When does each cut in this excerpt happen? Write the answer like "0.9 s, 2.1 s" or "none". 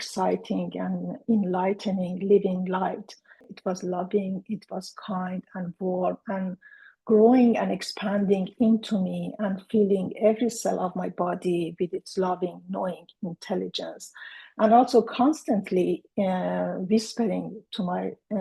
3.5 s